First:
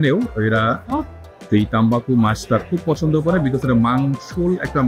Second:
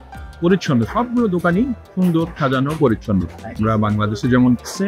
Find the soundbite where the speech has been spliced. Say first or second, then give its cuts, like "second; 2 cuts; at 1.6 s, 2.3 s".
second; 1 cut; at 3.6 s